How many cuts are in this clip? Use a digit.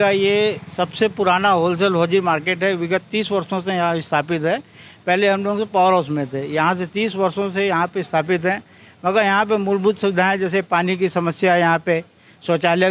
0